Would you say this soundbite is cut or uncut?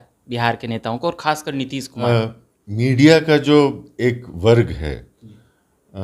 cut